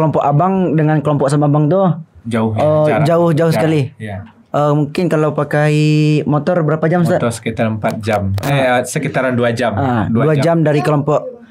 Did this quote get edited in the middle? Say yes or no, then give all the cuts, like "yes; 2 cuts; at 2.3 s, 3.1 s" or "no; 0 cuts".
no; 0 cuts